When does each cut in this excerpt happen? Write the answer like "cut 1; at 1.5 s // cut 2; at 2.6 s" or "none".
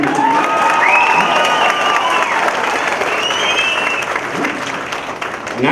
none